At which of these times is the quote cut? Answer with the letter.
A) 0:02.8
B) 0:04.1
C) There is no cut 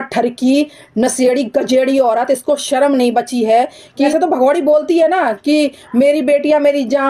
B